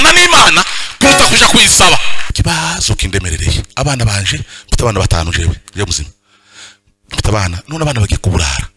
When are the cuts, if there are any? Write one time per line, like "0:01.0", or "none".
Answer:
0:02.1